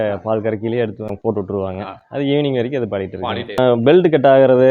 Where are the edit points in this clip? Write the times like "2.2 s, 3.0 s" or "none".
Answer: 1.0 s, 3.8 s